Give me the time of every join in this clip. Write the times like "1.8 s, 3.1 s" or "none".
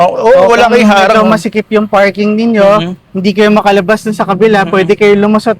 none